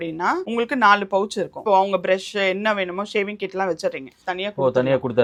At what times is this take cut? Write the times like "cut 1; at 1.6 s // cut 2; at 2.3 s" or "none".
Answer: none

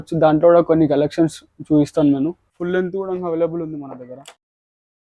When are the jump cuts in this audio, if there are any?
cut 1; at 2.5 s

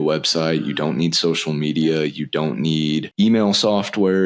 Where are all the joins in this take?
cut 1; at 3.1 s

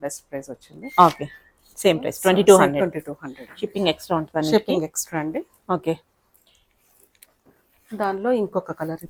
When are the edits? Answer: none

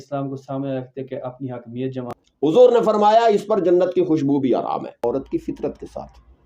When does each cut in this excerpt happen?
cut 1; at 2.1 s // cut 2; at 5.0 s

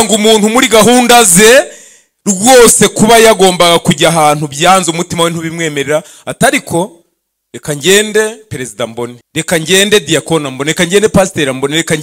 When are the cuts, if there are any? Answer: cut 1; at 9.2 s

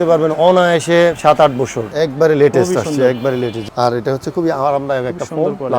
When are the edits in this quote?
cut 1; at 1.8 s // cut 2; at 3.6 s

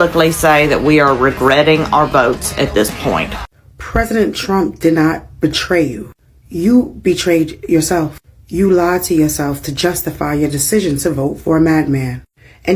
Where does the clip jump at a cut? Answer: cut 1; at 3.3 s

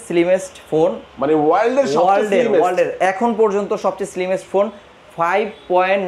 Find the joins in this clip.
none

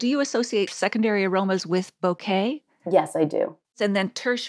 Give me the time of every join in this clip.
none

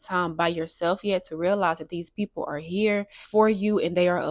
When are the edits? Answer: cut 1; at 3.2 s

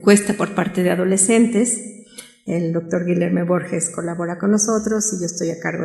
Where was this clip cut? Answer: cut 1; at 1.4 s

